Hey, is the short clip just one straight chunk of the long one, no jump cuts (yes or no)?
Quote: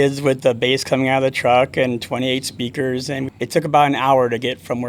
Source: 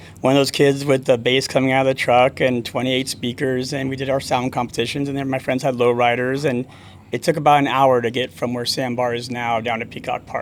no